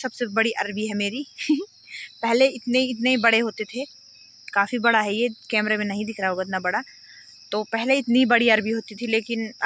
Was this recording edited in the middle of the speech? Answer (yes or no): no